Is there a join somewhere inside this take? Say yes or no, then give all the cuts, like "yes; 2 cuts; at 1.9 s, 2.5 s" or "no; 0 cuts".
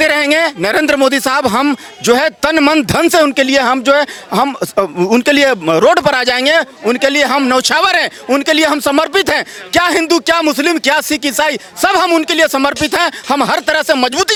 no; 0 cuts